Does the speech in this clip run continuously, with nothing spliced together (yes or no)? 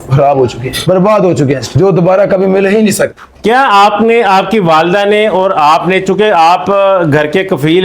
yes